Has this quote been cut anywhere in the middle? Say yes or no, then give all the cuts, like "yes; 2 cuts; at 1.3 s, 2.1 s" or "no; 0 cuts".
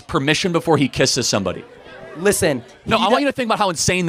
no; 0 cuts